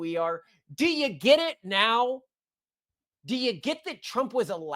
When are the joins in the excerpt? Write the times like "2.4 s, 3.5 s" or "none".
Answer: 3.0 s